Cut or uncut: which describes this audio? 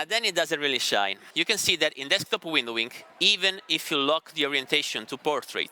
cut